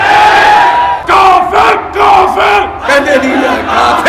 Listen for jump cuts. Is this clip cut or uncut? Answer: cut